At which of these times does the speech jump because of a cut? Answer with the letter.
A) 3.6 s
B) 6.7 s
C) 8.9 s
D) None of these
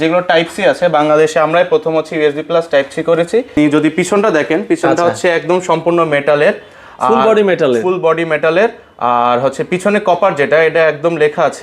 A